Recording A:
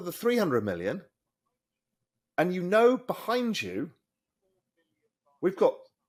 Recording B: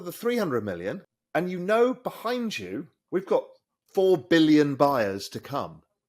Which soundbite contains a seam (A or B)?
B